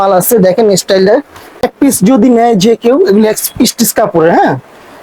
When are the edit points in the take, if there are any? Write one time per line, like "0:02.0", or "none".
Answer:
0:01.6

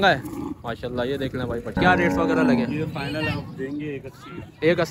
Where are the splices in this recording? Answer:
0:01.8

